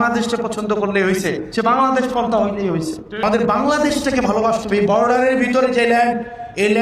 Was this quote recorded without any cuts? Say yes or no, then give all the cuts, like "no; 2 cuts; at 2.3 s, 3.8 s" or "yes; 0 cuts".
no; 1 cut; at 3.2 s